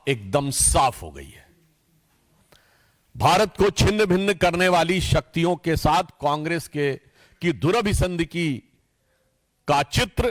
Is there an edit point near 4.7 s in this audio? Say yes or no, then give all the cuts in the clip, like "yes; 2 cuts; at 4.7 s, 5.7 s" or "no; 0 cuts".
no; 1 cut; at 1.1 s